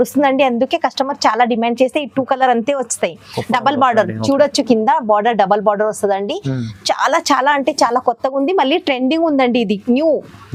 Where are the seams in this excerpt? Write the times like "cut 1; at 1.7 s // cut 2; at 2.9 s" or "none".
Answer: none